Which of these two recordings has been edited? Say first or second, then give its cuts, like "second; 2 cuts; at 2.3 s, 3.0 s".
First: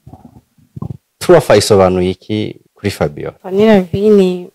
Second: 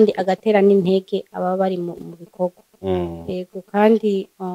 first; 1 cut; at 2.9 s